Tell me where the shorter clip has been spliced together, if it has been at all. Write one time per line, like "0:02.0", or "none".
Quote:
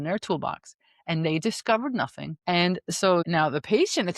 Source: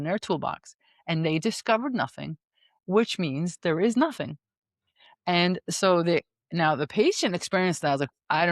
0:02.3
0:03.2